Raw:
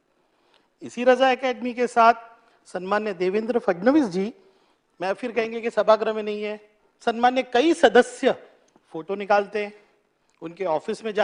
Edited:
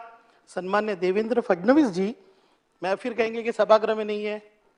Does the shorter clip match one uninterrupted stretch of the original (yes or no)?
yes